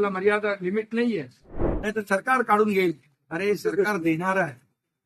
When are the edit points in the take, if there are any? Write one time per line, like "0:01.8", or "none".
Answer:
0:01.7